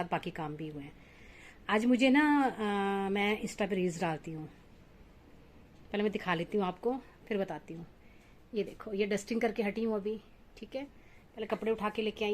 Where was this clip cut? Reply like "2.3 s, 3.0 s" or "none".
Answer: none